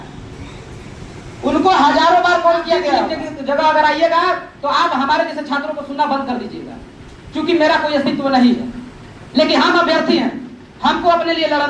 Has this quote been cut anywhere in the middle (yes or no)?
no